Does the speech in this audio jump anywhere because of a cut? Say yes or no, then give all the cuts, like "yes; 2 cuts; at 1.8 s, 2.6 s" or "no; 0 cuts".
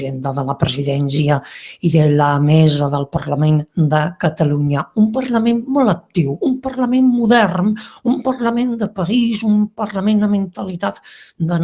yes; 1 cut; at 1.0 s